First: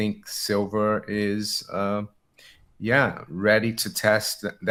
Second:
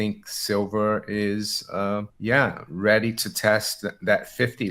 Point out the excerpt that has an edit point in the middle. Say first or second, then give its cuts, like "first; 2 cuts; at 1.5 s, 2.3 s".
second; 1 cut; at 2.1 s